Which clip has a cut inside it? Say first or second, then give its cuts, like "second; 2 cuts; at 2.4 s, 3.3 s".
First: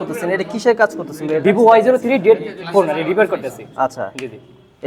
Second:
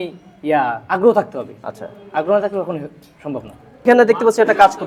second; 1 cut; at 3.9 s